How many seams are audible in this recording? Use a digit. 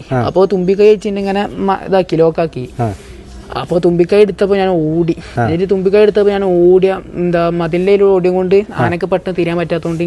1